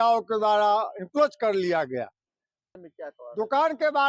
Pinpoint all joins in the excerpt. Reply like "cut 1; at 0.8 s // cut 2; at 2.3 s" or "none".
cut 1; at 2.7 s